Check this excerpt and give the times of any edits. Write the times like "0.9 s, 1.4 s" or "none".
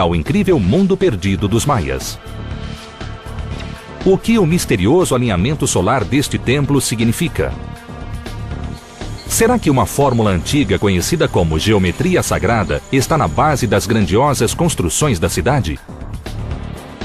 10.3 s